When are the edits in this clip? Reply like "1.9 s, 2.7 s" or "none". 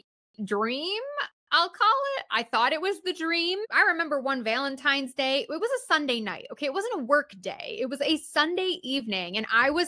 3.7 s